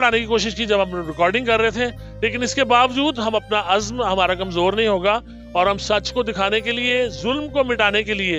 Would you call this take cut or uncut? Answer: uncut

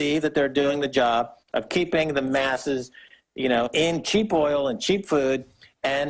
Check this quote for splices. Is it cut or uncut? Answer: uncut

